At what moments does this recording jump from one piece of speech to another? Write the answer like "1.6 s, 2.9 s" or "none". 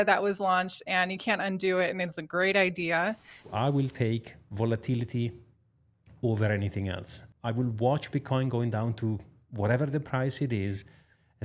3.3 s